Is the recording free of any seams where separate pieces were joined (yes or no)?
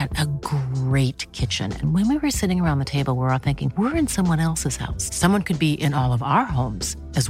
yes